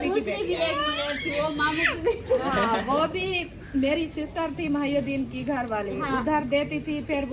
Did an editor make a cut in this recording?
no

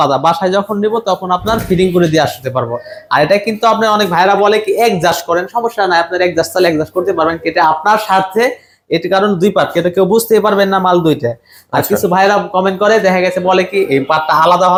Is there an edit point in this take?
no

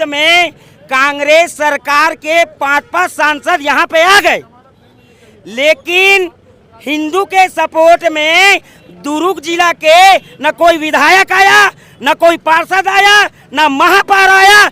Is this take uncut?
yes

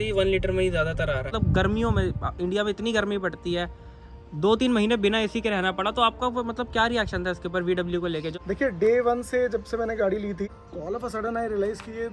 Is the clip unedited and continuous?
no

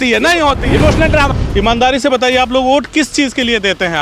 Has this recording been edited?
yes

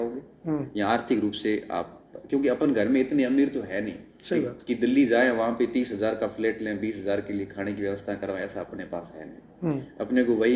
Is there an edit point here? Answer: no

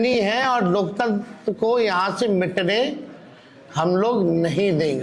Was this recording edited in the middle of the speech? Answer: no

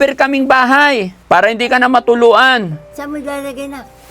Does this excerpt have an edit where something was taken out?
yes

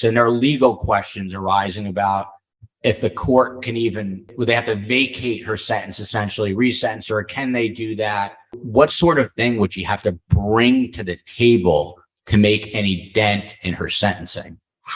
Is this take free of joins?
no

